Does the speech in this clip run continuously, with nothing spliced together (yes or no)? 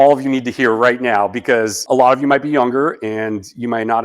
no